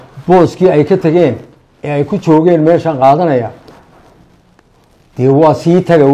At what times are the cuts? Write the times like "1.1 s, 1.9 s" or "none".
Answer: none